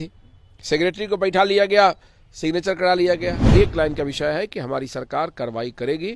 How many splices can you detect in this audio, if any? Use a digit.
1